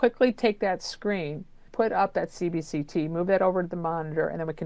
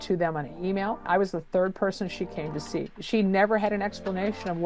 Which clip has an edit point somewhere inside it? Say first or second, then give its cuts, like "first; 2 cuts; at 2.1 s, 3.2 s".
second; 2 cuts; at 1.0 s, 3.0 s